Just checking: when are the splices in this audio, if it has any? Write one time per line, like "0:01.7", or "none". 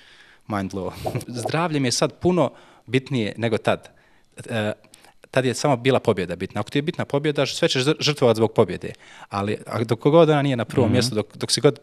0:01.2

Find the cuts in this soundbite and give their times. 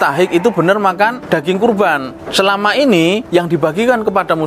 0:01.2
0:02.2
0:03.2

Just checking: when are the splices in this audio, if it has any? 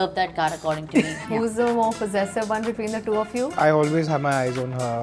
0:01.2
0:03.6

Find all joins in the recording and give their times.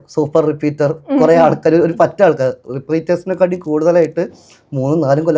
none

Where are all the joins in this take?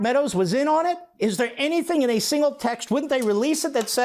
none

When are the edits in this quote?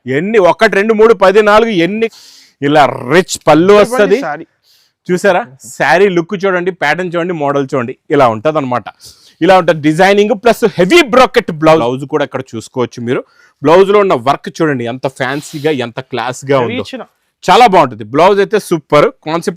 0:02.1
0:11.8

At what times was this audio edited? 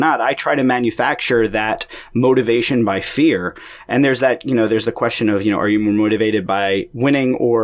none

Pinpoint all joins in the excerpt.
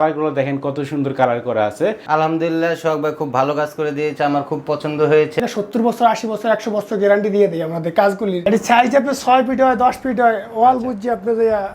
0:02.0
0:05.4
0:08.4

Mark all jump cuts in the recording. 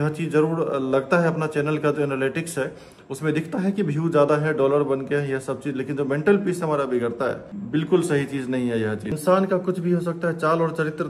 0:07.5
0:09.2

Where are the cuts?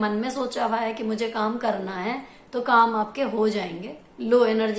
none

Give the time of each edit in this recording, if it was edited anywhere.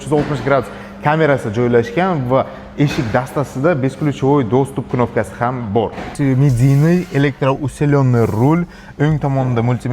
0:06.1

